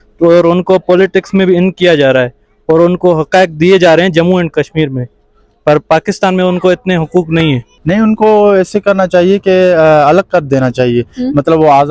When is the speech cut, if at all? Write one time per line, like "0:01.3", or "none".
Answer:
0:07.7